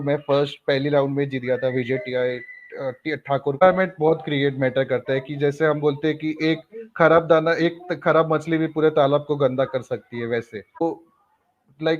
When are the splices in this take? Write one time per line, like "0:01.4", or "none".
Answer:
0:03.6
0:10.8